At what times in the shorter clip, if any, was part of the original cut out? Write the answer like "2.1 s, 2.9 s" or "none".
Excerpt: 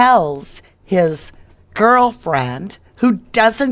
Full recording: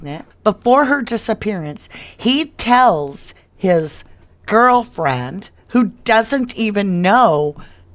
none